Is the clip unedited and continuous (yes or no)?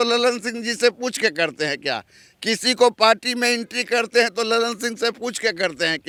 yes